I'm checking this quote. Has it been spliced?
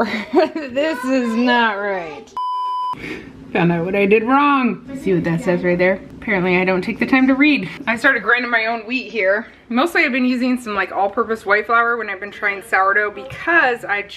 no; 0 cuts

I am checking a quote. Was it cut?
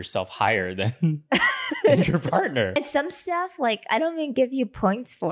yes; 1 cut; at 2.8 s

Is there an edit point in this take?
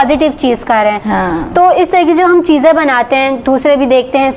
no; 0 cuts

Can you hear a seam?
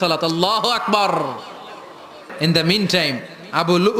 yes; 1 cut; at 2.3 s

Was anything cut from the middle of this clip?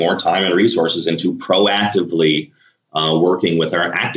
no; 0 cuts

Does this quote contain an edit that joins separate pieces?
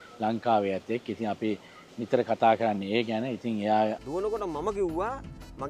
yes; 1 cut; at 4.0 s

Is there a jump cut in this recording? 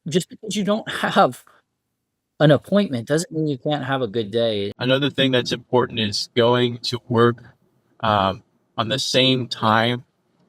yes; 1 cut; at 4.8 s

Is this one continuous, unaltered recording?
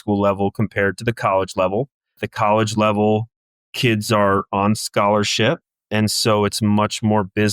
no; 1 cut; at 2.2 s

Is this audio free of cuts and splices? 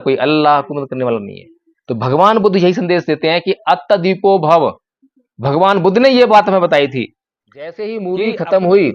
no; 1 cut; at 7.8 s

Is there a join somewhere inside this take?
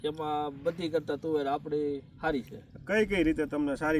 no; 0 cuts

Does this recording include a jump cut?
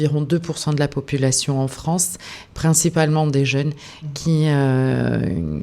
no; 0 cuts

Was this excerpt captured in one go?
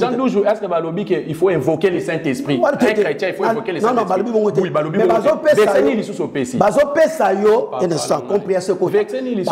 yes; 0 cuts

